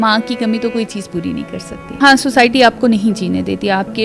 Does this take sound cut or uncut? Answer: cut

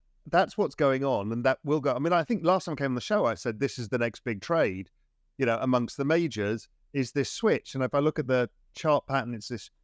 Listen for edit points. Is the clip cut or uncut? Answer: uncut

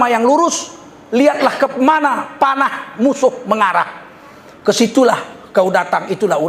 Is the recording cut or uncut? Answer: uncut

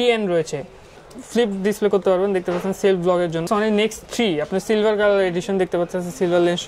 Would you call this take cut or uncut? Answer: cut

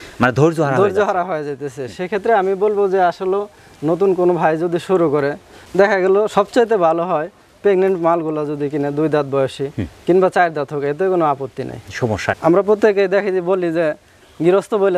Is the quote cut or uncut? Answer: uncut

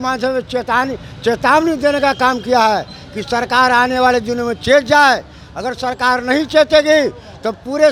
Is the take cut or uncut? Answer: uncut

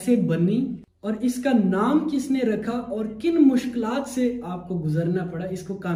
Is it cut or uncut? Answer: uncut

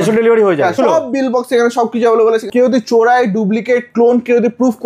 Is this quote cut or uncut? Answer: cut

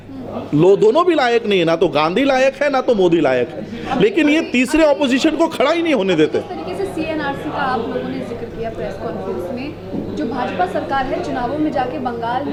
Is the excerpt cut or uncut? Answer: uncut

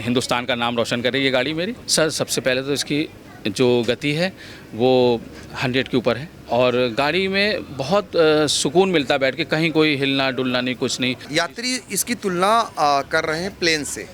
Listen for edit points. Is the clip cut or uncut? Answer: cut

